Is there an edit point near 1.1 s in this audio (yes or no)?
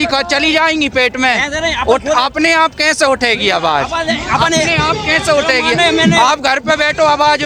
no